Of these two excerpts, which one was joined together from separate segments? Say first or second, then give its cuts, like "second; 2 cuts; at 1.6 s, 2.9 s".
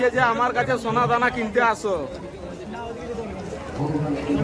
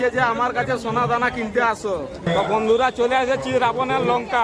second; 1 cut; at 2.3 s